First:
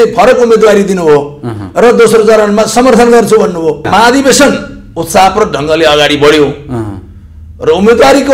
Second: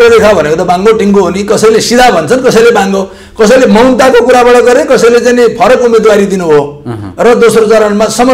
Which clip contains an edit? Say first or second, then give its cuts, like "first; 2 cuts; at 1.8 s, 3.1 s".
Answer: first; 1 cut; at 3.9 s